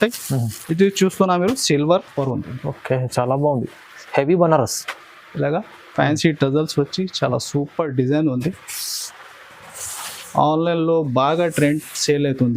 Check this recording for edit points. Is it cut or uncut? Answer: cut